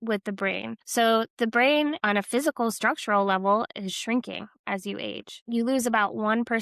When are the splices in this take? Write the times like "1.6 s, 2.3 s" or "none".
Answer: 0.8 s, 2.0 s, 5.4 s